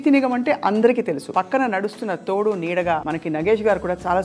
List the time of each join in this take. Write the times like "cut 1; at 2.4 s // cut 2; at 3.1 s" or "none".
cut 1; at 1.2 s // cut 2; at 3.1 s

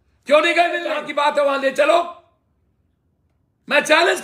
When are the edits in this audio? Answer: cut 1; at 1.0 s

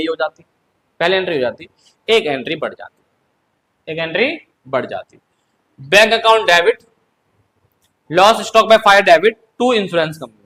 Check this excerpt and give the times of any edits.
none

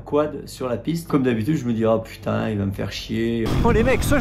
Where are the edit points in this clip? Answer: cut 1; at 1.1 s // cut 2; at 3.5 s

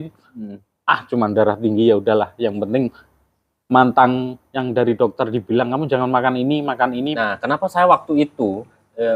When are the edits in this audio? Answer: cut 1; at 7.2 s

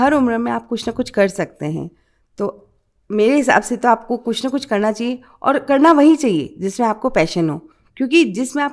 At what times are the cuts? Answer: none

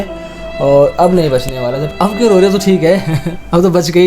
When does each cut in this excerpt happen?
cut 1; at 1.9 s

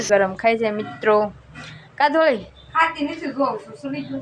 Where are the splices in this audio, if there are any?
none

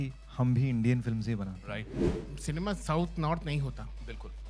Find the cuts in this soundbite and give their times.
cut 1; at 1.9 s

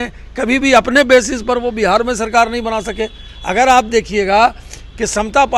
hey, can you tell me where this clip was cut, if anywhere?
none

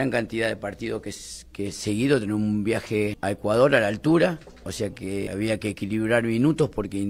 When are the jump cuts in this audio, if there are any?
cut 1; at 3.2 s // cut 2; at 5.3 s

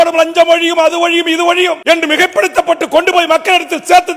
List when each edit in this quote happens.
cut 1; at 1.8 s

